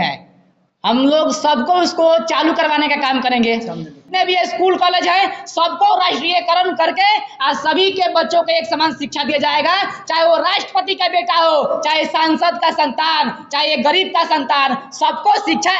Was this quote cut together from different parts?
yes; 1 cut; at 3.9 s

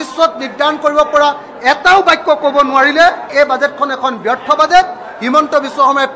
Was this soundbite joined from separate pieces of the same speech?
yes; 1 cut; at 3.3 s

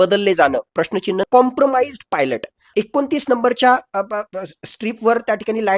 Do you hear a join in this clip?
yes; 2 cuts; at 1.2 s, 2.7 s

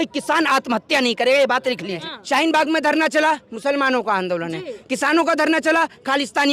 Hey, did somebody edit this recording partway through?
yes; 1 cut; at 2.1 s

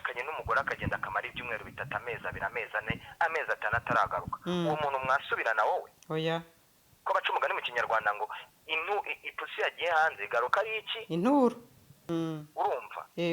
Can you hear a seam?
yes; 1 cut; at 12.0 s

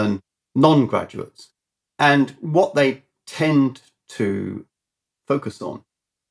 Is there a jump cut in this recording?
no; 0 cuts

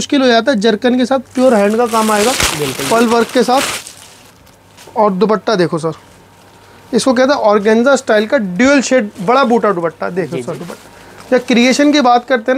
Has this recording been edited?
no; 0 cuts

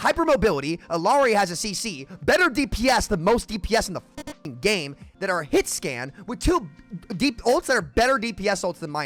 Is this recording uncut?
yes; 0 cuts

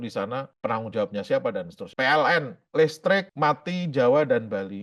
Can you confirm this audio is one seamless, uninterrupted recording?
no; 2 cuts; at 1.8 s, 3.3 s

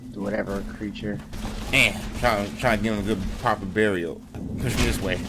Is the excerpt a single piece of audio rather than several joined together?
no; 1 cut; at 4.3 s

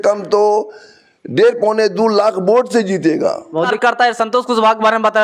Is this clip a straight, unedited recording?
no; 1 cut; at 3.7 s

